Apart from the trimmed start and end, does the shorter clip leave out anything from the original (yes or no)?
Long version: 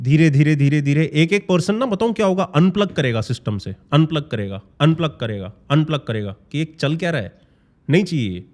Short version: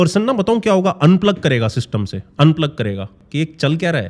yes